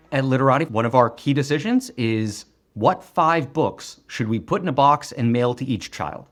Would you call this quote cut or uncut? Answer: uncut